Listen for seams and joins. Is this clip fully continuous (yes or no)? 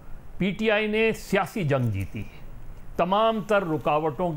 yes